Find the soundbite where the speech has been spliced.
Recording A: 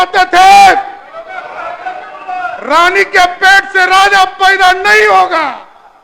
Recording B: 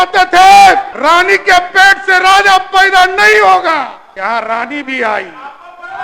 B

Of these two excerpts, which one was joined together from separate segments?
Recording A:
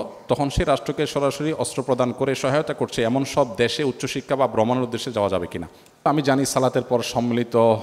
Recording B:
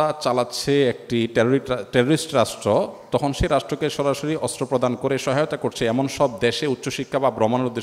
A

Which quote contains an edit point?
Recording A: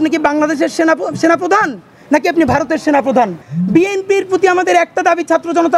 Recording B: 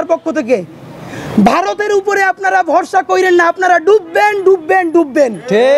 A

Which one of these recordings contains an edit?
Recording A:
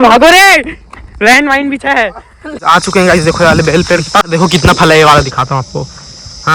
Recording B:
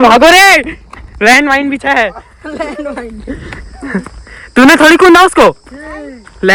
A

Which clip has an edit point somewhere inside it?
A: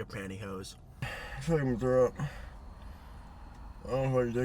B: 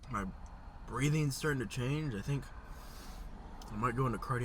A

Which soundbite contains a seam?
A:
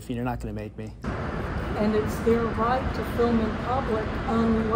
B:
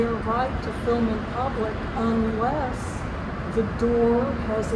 A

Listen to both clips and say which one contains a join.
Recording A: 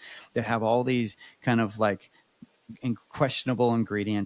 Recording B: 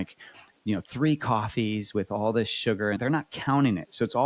B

